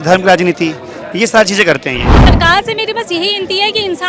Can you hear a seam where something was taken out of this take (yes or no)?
yes